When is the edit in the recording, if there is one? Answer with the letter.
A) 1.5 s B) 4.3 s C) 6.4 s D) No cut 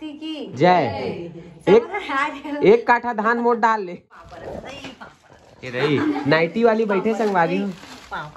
B